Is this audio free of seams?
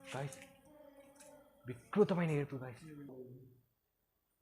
no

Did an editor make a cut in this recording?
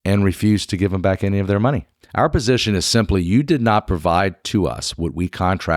yes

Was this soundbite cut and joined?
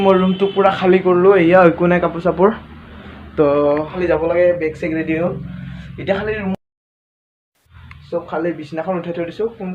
yes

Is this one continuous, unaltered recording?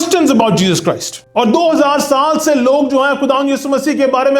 no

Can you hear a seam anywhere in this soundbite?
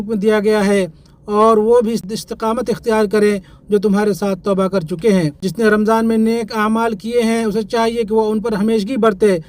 yes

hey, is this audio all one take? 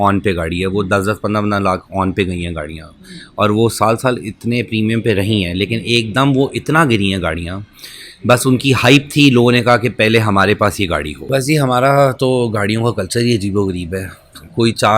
no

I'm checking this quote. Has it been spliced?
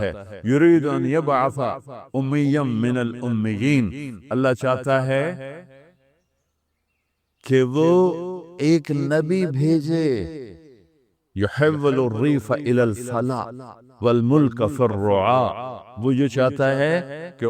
no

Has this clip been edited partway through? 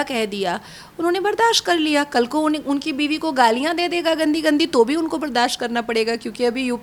no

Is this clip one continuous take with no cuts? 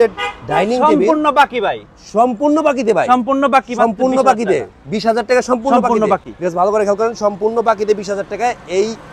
yes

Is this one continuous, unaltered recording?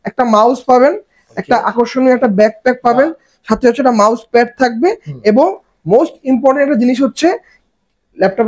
yes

